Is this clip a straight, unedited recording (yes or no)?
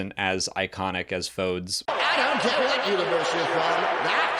yes